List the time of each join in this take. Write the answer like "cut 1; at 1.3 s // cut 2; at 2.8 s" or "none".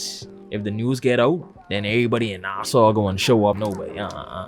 cut 1; at 3.6 s